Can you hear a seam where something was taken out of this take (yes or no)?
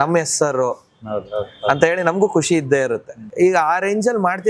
yes